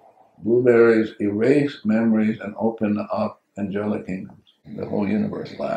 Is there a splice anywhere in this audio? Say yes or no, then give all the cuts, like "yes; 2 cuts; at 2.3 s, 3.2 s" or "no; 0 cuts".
yes; 1 cut; at 4.6 s